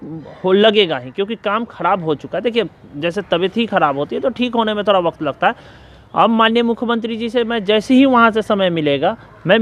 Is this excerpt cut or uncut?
uncut